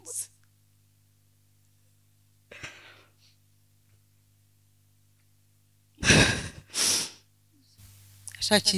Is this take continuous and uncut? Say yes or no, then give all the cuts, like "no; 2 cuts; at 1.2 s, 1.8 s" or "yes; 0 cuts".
no; 1 cut; at 7.8 s